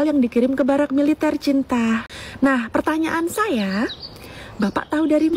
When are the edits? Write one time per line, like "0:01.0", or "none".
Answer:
0:02.2